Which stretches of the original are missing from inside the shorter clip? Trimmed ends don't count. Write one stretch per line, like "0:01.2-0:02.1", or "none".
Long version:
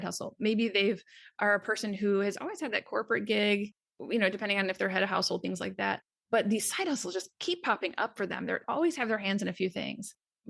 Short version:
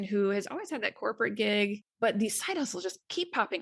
0:03.7-0:06.2